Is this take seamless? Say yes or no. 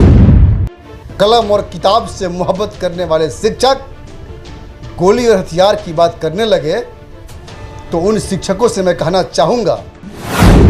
no